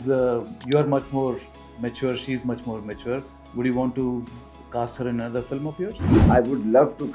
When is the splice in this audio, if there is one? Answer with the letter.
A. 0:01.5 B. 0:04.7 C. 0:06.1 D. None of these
C